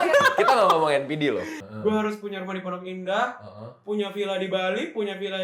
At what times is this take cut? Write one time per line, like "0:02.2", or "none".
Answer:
0:01.5